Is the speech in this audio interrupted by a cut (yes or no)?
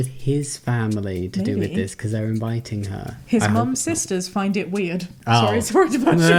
no